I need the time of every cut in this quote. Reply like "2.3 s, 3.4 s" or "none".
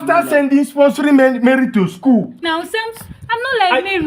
2.4 s